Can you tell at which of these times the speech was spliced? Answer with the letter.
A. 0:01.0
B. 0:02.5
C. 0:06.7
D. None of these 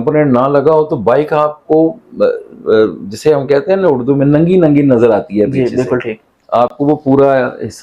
D